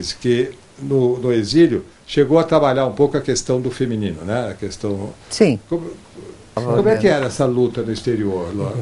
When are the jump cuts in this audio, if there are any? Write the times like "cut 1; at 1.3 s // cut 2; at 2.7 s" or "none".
none

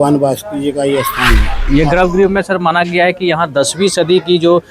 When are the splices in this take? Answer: cut 1; at 1.5 s

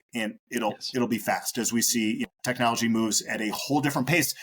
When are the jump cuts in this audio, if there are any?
cut 1; at 2.3 s

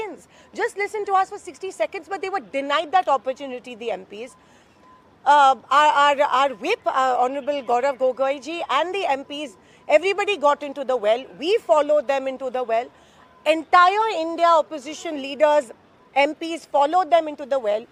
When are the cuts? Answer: none

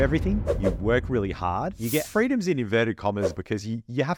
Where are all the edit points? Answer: cut 1; at 2.1 s // cut 2; at 3.4 s

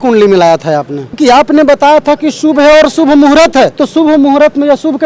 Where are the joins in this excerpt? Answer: cut 1; at 1.2 s // cut 2; at 3.8 s

